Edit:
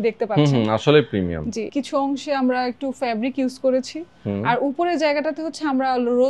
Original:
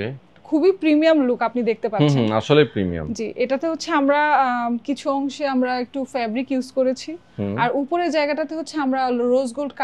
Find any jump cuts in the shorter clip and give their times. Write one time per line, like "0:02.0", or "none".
0:01.7